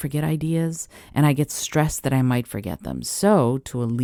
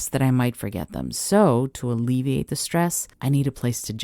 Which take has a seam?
second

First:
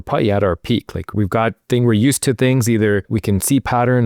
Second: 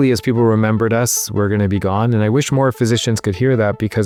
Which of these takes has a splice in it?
first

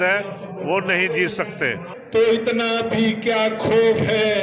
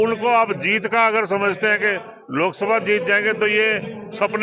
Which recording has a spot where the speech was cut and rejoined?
first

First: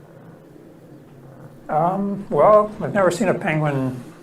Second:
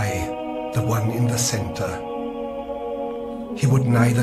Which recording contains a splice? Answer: first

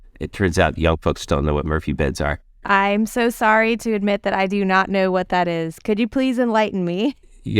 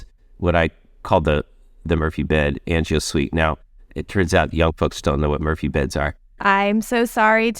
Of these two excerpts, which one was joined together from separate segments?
second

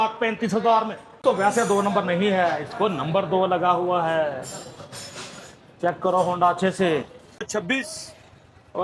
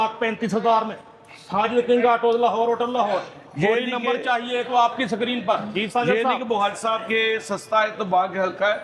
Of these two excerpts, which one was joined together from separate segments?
first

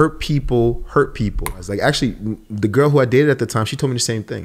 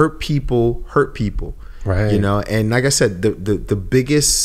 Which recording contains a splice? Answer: first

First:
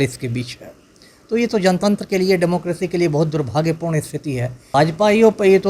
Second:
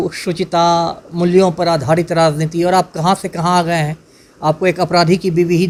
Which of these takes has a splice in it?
first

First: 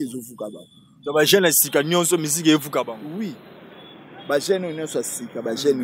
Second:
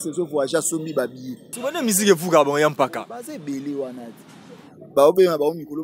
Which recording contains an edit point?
second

